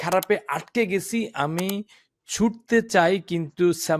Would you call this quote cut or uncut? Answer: uncut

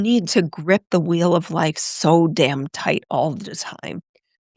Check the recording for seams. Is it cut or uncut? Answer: uncut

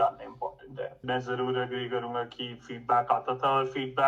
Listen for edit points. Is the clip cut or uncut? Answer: cut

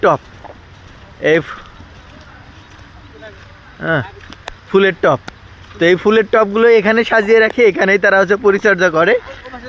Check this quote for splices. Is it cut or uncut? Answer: uncut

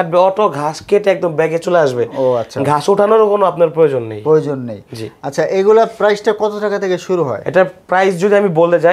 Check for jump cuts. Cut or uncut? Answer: uncut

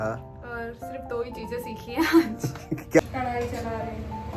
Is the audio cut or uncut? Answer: cut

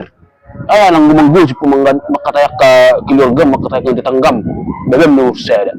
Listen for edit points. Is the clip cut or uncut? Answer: uncut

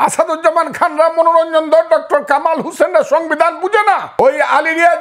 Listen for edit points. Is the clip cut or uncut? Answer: cut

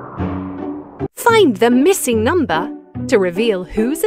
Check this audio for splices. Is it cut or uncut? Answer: cut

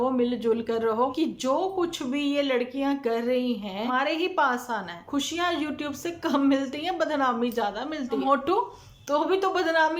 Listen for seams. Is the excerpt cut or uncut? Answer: cut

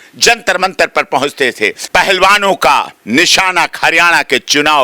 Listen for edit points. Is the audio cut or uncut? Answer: cut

